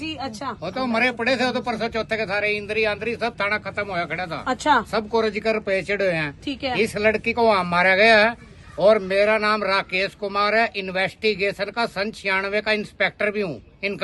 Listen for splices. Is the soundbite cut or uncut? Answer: uncut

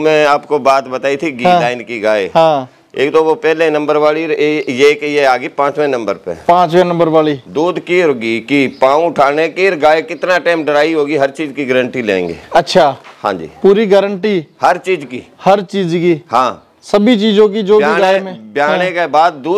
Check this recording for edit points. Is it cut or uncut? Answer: uncut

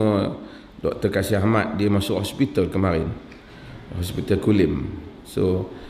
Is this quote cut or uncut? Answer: uncut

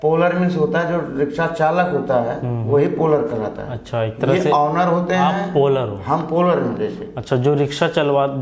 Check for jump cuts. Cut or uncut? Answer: uncut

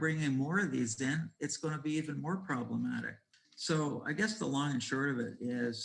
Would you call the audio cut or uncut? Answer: uncut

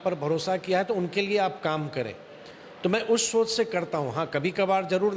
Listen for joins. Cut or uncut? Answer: uncut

